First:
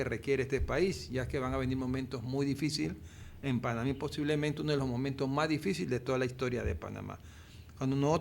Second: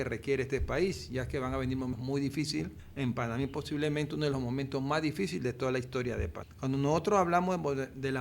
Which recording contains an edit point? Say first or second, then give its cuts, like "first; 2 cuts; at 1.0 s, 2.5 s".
second; 3 cuts; at 1.9 s, 2.8 s, 6.4 s